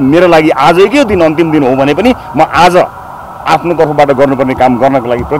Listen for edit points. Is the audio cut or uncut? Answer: uncut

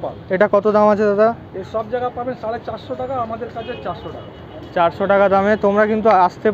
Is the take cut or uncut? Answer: uncut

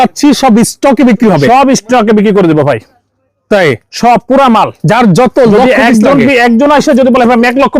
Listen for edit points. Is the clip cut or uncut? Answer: uncut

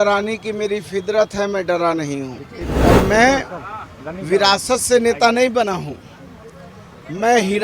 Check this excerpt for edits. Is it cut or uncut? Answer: cut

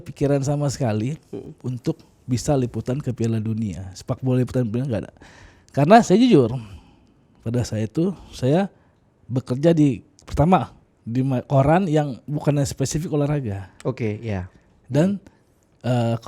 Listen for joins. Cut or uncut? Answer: uncut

